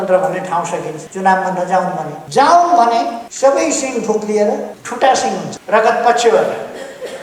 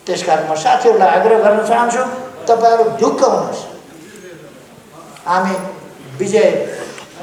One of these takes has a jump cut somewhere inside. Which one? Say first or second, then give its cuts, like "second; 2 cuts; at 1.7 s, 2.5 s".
first; 5 cuts; at 1.0 s, 2.2 s, 3.2 s, 4.8 s, 5.5 s